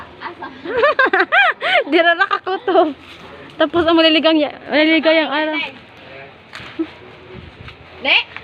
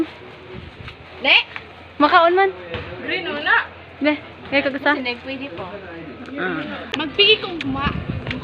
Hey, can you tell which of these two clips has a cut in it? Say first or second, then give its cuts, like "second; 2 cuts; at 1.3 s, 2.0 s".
second; 1 cut; at 6.9 s